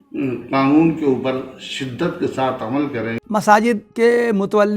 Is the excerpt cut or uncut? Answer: cut